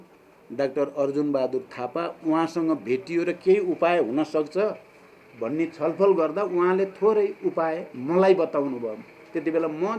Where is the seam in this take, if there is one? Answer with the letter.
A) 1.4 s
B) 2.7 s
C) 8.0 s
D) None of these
D